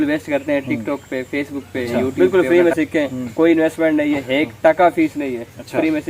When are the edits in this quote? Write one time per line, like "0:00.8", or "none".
0:02.1

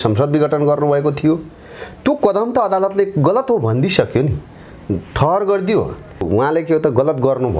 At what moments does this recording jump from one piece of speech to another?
0:06.2

